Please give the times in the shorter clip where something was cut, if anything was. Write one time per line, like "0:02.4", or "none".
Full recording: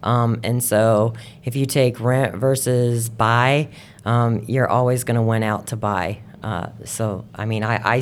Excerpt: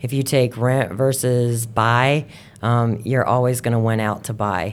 none